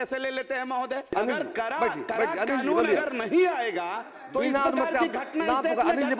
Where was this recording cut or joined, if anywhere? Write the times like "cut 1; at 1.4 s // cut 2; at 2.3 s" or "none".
cut 1; at 1.1 s